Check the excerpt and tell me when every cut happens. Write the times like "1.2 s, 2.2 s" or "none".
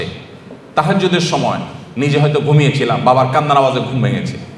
none